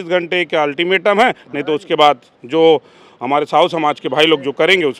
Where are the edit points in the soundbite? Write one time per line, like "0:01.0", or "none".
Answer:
none